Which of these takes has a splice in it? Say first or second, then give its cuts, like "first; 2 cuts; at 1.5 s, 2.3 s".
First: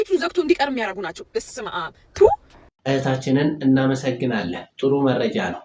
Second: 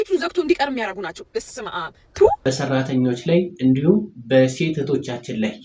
second; 1 cut; at 2.4 s